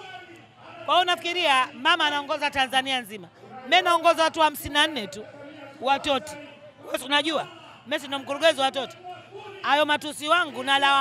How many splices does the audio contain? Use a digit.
0